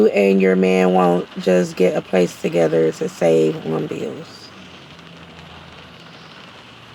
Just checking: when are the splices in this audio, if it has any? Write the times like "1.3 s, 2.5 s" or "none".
none